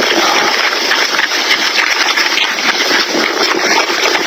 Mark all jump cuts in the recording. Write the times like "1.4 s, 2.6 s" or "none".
none